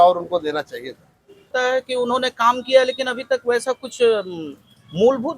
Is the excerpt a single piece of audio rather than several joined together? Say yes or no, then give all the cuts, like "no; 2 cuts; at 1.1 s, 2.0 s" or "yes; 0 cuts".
no; 1 cut; at 1.5 s